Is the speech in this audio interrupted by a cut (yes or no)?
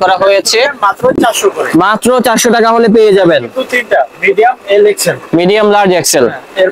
no